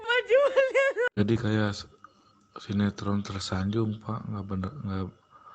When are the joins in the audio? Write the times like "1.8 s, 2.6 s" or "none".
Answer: 1.1 s